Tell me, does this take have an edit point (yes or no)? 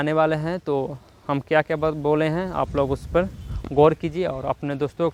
no